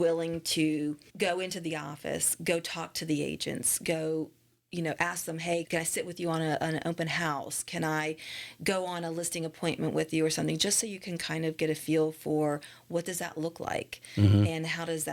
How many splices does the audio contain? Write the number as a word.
one